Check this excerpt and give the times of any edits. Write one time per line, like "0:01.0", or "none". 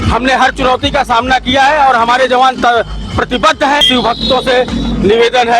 0:03.8